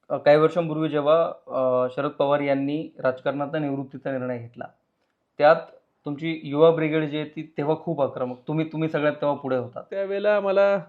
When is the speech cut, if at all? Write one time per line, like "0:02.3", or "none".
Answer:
0:09.9